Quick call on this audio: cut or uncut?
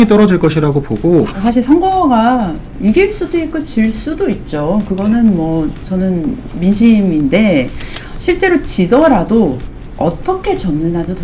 cut